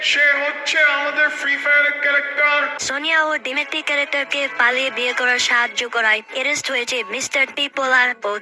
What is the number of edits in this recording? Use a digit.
1